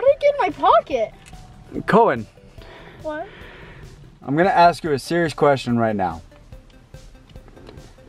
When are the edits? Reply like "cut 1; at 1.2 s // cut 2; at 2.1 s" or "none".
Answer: cut 1; at 4.2 s